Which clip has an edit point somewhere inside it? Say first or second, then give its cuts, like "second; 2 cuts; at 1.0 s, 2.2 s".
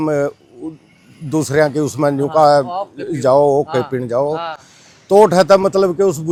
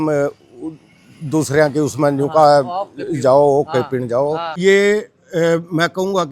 second; 1 cut; at 4.6 s